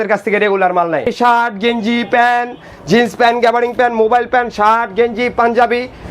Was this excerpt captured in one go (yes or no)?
no